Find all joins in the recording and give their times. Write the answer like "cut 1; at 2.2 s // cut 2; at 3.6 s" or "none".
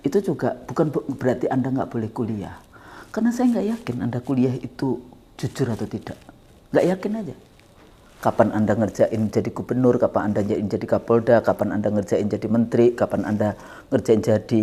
none